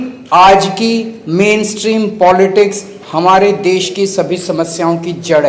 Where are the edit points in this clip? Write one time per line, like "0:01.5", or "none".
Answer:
none